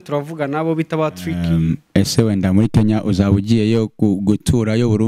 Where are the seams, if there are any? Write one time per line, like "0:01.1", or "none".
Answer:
0:01.4